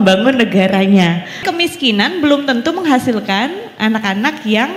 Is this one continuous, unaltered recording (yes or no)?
no